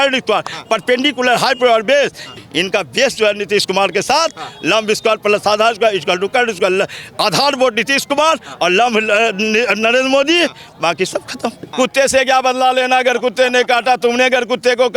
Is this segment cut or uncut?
cut